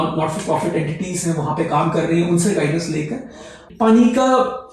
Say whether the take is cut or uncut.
cut